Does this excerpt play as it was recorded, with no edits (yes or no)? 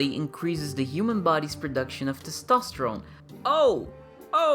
yes